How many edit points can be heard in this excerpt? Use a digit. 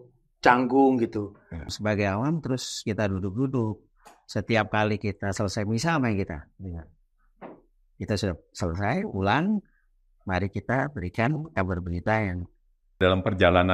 2